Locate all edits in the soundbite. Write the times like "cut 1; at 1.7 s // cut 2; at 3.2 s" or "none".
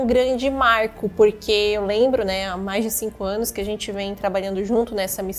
none